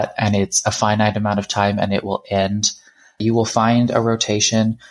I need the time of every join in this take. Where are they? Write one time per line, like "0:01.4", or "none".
0:03.2